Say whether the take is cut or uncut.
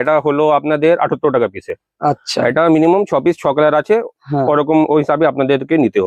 uncut